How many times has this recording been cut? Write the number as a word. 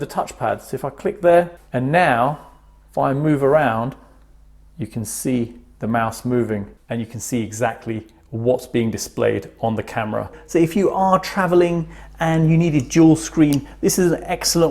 three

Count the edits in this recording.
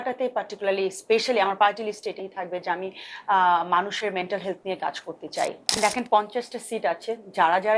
one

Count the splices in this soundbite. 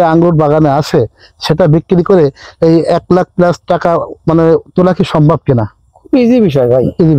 zero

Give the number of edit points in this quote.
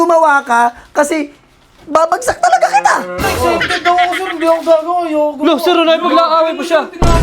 one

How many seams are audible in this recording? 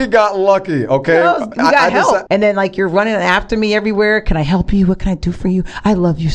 one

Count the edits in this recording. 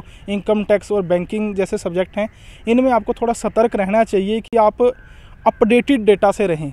zero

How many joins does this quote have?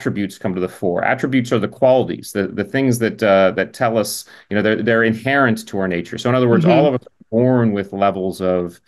zero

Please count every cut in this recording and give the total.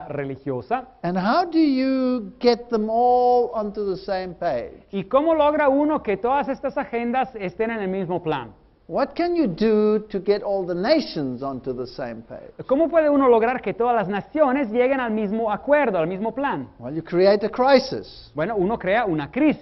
zero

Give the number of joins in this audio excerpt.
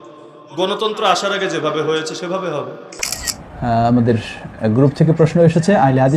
one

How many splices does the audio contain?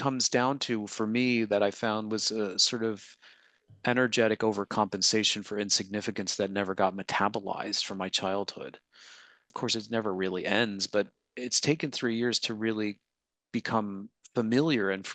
one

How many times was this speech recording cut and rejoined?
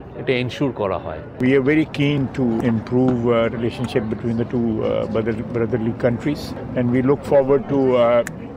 three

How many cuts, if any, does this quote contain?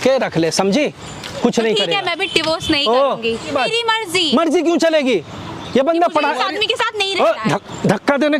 one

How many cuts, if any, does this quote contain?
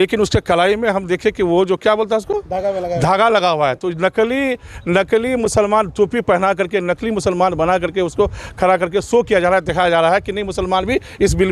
zero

